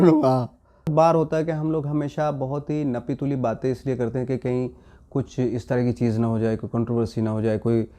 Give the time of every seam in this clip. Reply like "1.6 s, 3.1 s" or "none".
0.9 s